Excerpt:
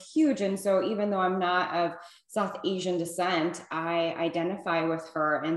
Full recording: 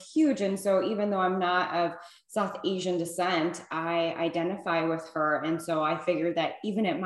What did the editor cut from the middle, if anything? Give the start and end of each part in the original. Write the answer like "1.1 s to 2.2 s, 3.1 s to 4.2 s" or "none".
none